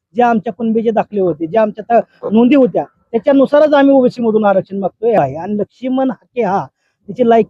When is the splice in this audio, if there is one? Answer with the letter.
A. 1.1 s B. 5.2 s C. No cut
B